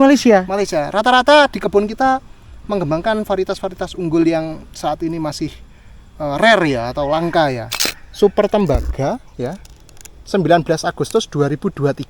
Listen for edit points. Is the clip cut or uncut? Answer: cut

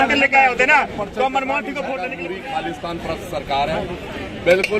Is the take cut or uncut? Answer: cut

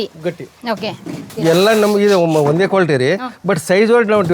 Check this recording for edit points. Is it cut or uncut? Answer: cut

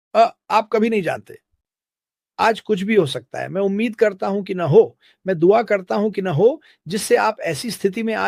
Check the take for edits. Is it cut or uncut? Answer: uncut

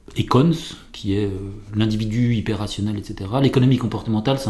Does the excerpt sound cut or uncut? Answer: uncut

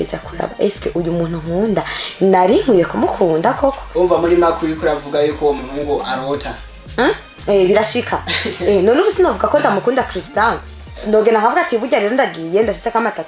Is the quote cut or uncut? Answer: uncut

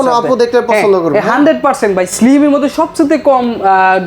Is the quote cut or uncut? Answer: uncut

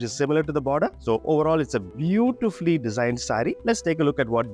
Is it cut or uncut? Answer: uncut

